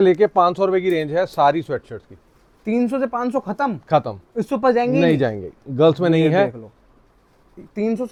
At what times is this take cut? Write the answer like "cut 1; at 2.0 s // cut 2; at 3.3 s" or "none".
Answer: none

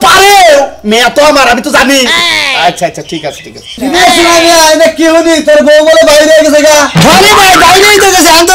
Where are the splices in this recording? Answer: cut 1; at 3.7 s

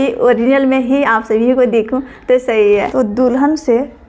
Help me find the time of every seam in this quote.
cut 1; at 2.9 s

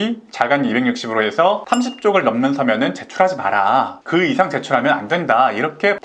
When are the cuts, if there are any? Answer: none

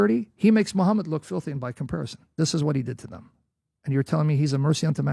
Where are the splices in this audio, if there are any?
cut 1; at 2.2 s

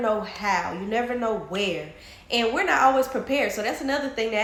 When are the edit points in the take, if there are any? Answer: none

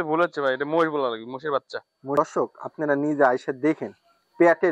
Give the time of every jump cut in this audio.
cut 1; at 2.1 s

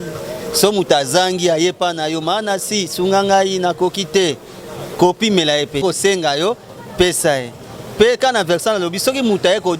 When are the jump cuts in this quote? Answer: cut 1; at 5.8 s

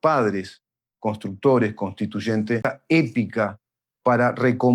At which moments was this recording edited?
cut 1; at 2.7 s

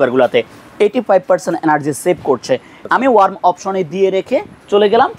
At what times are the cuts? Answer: cut 1; at 2.8 s

